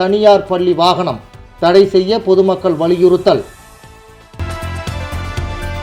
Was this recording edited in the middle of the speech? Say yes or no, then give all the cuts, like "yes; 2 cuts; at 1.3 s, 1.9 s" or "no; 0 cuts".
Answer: no; 0 cuts